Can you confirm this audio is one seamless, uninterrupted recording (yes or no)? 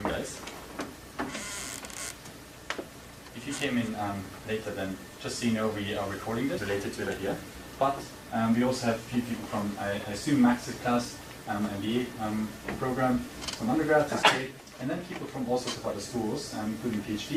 yes